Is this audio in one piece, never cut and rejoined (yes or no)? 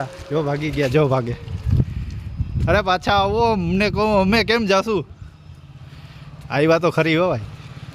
yes